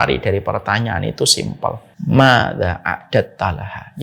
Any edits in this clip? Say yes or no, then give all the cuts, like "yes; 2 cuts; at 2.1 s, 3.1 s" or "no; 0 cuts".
yes; 1 cut; at 1.9 s